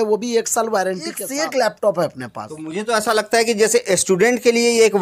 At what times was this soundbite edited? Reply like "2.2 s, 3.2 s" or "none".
1.2 s